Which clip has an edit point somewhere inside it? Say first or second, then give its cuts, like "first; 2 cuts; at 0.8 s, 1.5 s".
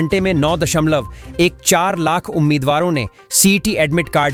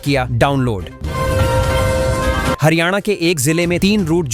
second; 2 cuts; at 1.0 s, 2.6 s